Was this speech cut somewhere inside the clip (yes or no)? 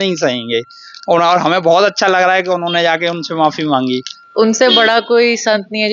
yes